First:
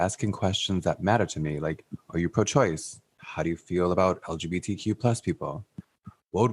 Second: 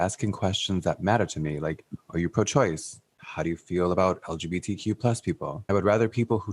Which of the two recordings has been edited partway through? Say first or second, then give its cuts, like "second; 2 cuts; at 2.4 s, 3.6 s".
second; 1 cut; at 5.6 s